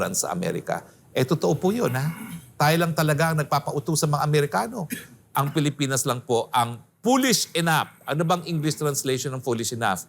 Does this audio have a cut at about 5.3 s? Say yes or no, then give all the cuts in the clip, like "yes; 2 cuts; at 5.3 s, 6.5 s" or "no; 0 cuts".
yes; 1 cut; at 5.3 s